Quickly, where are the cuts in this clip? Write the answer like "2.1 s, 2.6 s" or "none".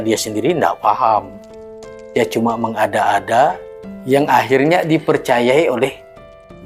none